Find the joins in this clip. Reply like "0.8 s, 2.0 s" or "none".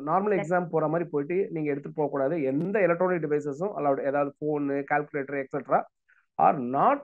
none

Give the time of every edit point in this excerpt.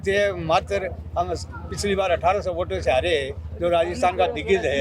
none

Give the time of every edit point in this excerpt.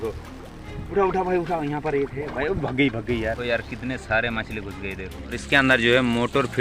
3.4 s, 5.4 s

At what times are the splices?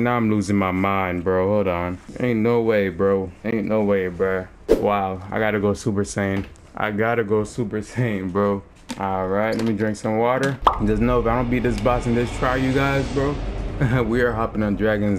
2.0 s, 3.3 s, 4.6 s, 6.6 s, 8.8 s, 10.7 s

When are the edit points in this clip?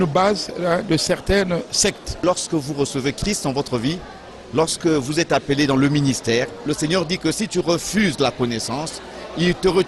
2.2 s, 6.6 s

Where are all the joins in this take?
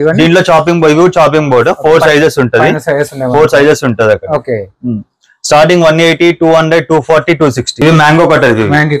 7.8 s

